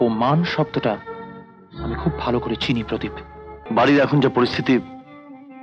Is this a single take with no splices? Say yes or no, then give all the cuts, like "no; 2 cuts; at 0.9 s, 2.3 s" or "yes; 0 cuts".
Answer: no; 1 cut; at 3.6 s